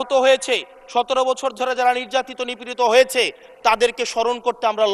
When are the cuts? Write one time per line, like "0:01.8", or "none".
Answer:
none